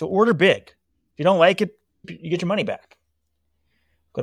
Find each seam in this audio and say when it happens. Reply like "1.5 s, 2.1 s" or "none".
2.1 s